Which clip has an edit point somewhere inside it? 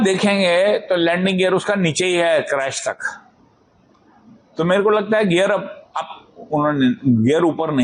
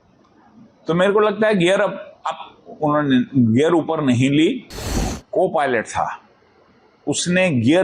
second; 1 cut; at 5.2 s

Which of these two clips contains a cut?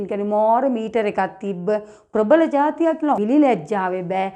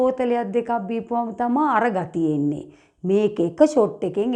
first; 1 cut; at 3.2 s

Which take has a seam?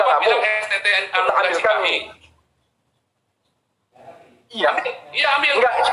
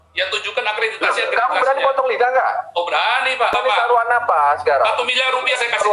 second; 1 cut; at 3.6 s

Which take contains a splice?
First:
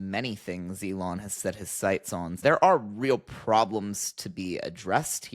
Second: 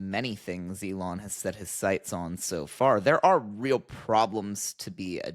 first; 1 cut; at 2.4 s

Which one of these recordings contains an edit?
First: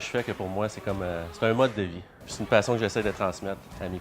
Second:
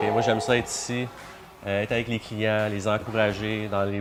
first; 1 cut; at 2.3 s

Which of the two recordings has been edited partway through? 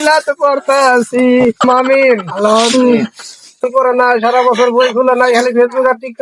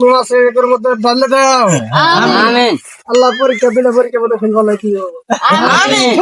first; 2 cuts; at 1.6 s, 3.7 s

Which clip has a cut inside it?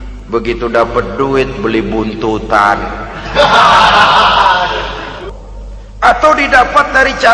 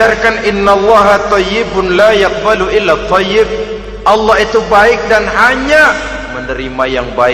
first; 1 cut; at 5.1 s

